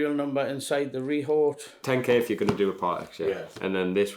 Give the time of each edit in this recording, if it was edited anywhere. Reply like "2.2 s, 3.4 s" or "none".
1.7 s

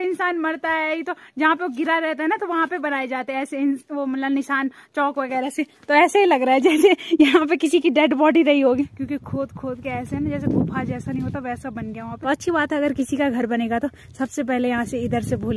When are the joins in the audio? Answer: 9.0 s, 12.1 s

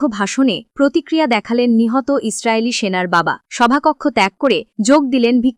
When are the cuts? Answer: none

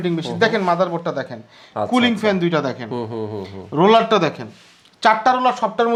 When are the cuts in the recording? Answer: none

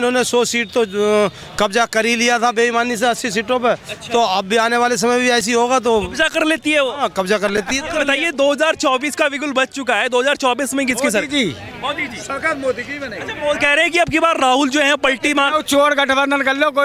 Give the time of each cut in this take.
7.9 s

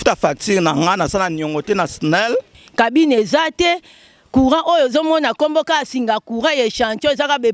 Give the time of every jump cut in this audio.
2.6 s

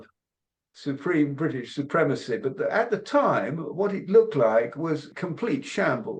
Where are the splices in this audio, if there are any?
5.1 s

